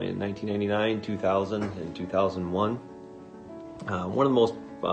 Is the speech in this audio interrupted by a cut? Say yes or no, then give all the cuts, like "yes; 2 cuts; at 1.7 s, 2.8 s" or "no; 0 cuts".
no; 0 cuts